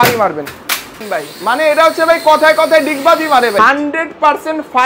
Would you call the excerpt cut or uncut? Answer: cut